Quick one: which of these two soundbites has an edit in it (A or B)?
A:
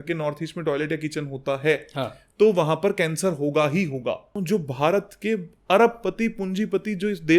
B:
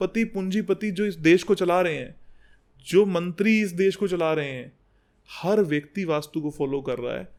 A